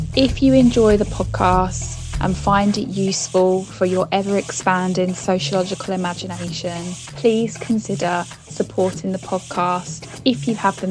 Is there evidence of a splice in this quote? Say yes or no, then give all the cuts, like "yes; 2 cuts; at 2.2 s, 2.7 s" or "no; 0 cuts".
no; 0 cuts